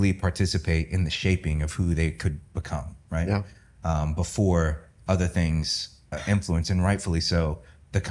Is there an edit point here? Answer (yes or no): yes